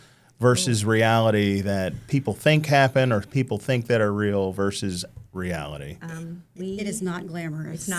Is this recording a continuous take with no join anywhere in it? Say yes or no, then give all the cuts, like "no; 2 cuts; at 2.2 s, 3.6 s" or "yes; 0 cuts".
yes; 0 cuts